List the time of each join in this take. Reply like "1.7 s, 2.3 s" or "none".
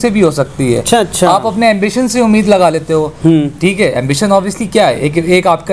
none